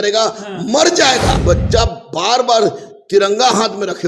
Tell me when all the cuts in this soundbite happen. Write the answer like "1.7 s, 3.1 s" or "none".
1.4 s